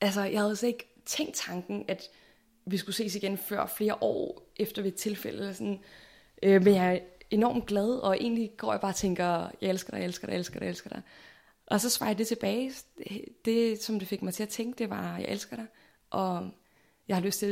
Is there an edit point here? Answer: no; 0 cuts

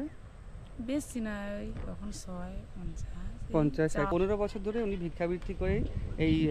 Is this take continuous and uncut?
no; 1 cut; at 4.1 s

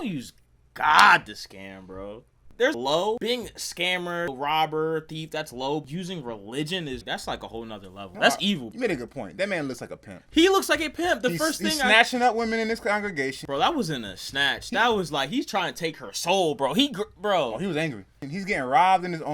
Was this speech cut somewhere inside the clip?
yes; 2 cuts; at 8.6 s, 13.4 s

